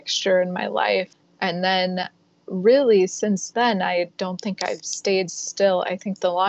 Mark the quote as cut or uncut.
cut